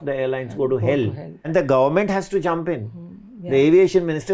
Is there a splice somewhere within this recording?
yes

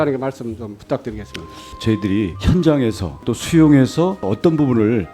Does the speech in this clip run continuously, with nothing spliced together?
no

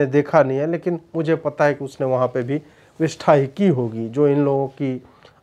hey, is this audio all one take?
yes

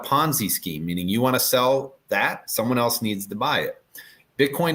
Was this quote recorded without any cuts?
yes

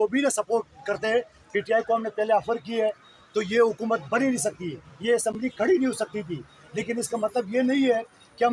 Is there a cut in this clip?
no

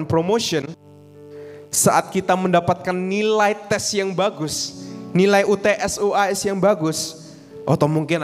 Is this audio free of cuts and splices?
yes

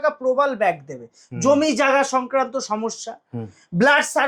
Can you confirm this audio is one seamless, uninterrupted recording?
yes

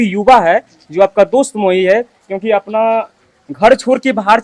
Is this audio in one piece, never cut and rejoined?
yes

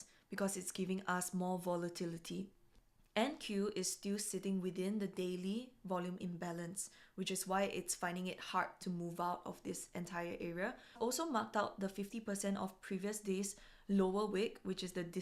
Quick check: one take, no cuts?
no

